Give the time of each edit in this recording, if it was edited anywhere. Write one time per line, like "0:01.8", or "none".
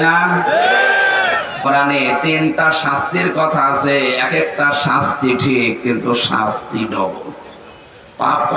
0:01.7